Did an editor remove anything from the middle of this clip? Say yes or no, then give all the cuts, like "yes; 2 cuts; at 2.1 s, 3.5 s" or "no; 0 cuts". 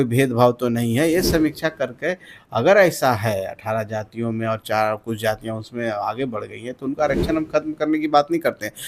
no; 0 cuts